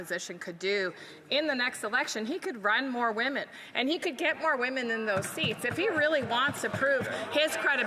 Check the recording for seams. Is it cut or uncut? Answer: uncut